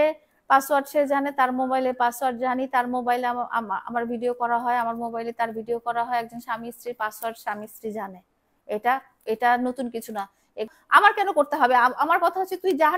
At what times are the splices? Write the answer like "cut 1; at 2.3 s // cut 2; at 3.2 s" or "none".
cut 1; at 10.7 s